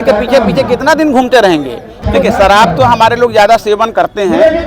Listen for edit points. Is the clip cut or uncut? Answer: cut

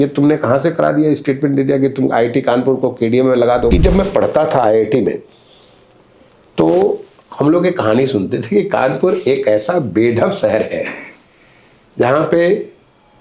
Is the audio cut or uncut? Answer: cut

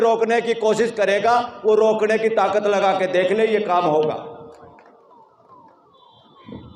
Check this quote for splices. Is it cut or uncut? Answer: uncut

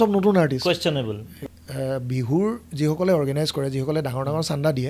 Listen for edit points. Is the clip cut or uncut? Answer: cut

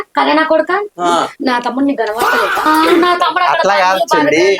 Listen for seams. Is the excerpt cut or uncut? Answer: cut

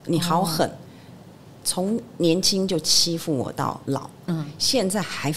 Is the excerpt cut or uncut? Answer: cut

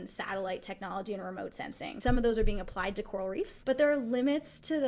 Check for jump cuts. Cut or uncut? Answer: cut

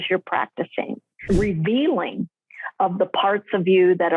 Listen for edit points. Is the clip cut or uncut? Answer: cut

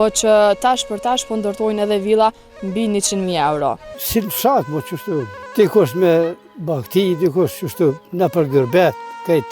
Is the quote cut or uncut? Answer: cut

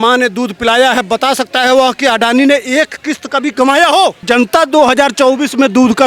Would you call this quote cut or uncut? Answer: cut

